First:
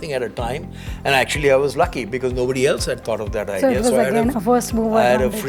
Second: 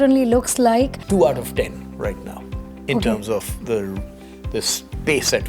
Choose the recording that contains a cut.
second; 1 cut; at 1.0 s

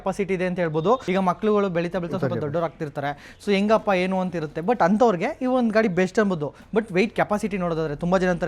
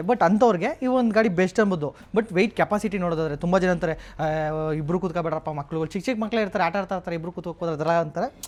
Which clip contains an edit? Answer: first; 1 cut; at 1.0 s

